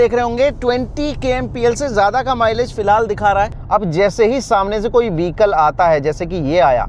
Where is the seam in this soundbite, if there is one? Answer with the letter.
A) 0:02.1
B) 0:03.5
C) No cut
B